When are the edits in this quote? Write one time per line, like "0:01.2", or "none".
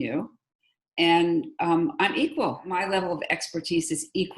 0:02.8